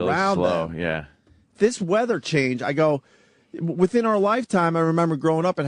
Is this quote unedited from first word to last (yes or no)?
no